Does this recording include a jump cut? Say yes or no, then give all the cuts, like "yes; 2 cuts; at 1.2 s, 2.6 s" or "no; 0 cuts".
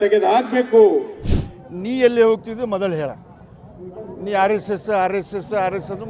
yes; 1 cut; at 1.1 s